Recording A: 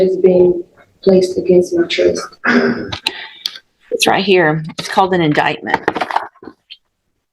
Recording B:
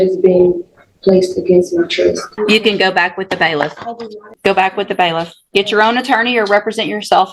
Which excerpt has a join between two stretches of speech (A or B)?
B